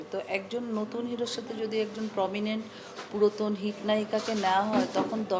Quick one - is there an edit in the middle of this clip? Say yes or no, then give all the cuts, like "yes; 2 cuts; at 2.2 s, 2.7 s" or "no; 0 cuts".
no; 0 cuts